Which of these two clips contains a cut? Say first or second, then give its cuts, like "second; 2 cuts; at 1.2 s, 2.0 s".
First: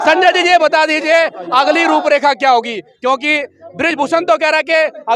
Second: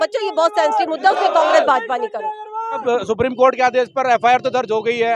second; 1 cut; at 2.8 s